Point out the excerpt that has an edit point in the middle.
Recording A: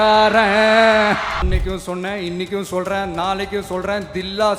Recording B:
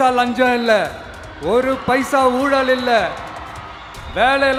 A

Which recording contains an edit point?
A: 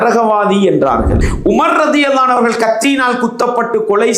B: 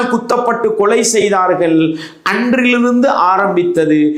A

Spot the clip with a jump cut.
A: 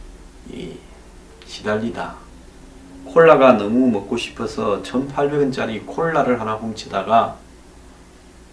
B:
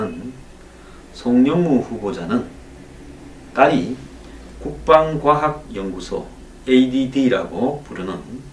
A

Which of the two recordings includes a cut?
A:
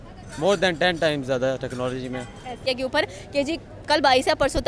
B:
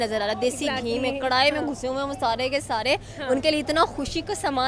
A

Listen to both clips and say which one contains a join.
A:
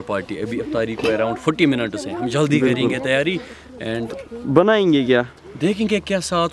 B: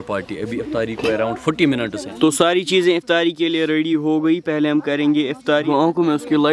B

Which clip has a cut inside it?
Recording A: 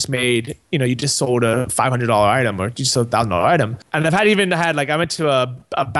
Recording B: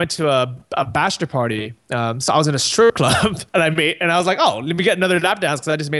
A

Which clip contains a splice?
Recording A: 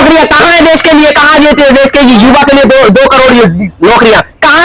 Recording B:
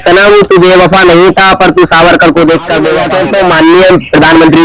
B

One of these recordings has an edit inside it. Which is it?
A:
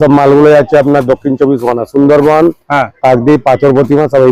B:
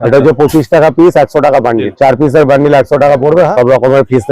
B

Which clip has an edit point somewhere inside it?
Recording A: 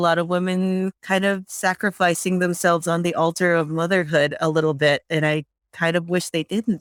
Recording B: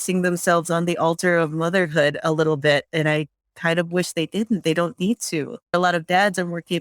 B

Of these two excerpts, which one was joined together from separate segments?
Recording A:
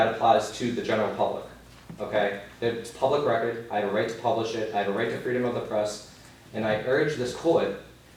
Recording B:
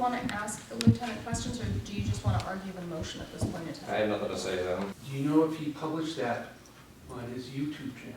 B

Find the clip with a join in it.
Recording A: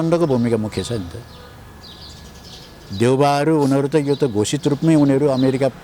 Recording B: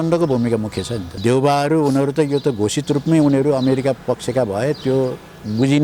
B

